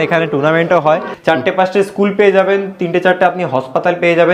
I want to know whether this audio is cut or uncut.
cut